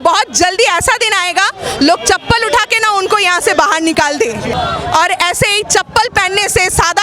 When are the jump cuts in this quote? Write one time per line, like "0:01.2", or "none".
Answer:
0:04.5